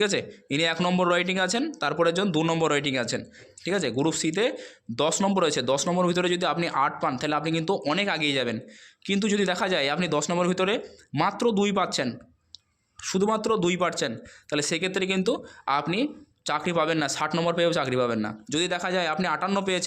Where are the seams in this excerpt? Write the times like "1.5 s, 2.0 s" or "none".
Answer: 3.4 s